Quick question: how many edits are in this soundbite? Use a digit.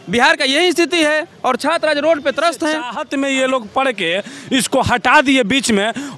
1